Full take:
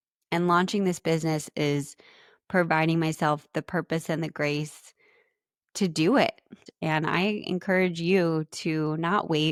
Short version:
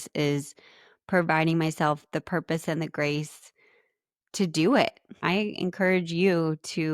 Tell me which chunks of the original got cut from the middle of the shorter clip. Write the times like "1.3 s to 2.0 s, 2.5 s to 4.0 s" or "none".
6.6 s to 7.1 s